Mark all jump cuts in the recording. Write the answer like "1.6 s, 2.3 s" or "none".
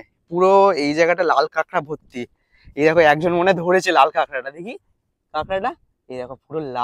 none